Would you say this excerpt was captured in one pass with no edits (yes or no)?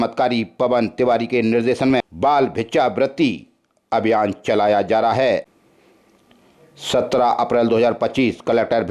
no